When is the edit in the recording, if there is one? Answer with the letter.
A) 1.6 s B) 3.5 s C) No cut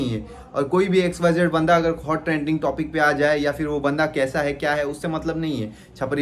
C